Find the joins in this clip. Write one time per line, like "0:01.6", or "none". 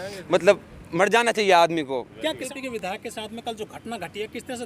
0:02.4